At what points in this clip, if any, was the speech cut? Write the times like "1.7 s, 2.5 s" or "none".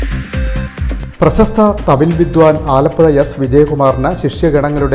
1.1 s